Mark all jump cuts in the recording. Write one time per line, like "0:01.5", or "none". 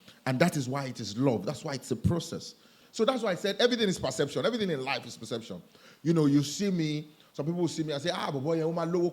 0:02.8

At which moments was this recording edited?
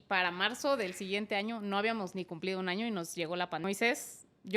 0:03.6

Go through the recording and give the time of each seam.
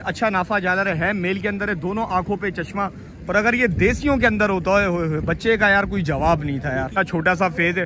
0:06.9

